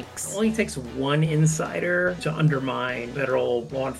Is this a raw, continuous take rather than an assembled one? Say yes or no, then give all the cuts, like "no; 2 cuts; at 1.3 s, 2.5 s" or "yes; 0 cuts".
no; 1 cut; at 2.2 s